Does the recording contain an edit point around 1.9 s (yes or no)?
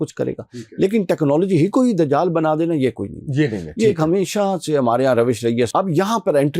no